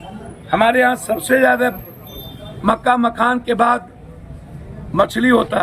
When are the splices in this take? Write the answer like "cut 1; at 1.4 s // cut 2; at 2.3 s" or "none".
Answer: none